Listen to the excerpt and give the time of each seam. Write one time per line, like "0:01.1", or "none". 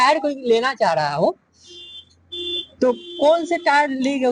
0:01.5